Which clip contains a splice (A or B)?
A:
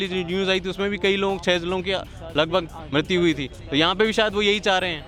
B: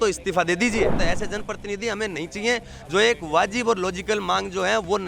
B